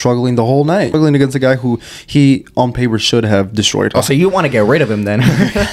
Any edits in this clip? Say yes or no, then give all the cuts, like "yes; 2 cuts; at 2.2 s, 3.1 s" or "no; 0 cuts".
yes; 2 cuts; at 0.9 s, 3.9 s